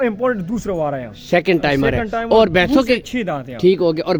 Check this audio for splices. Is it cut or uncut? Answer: uncut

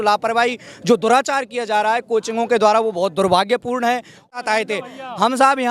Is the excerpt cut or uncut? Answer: cut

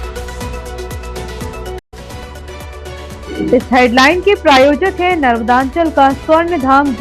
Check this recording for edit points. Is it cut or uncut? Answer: cut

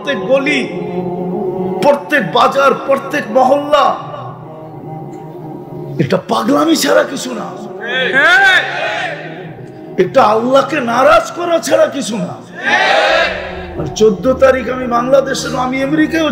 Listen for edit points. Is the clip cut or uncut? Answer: uncut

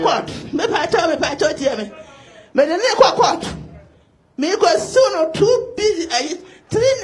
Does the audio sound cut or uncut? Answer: uncut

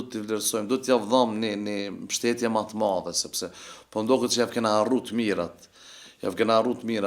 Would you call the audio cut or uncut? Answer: uncut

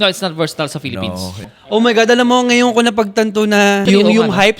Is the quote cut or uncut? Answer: cut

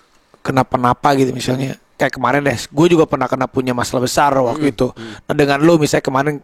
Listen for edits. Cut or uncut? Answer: cut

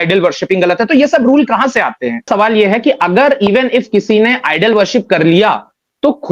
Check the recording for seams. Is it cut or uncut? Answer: cut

